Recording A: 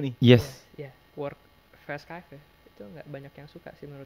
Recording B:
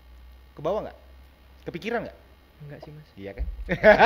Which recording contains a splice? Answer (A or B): A